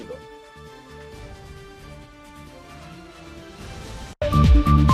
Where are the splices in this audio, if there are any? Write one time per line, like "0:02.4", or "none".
none